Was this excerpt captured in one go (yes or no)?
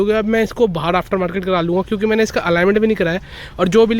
yes